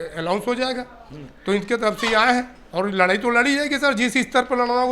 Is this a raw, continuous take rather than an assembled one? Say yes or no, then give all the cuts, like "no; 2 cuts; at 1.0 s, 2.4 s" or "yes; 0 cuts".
yes; 0 cuts